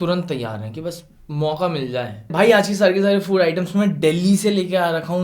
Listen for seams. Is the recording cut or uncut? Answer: cut